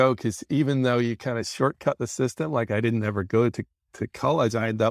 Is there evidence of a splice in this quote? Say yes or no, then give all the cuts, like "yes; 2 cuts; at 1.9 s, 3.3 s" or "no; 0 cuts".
no; 0 cuts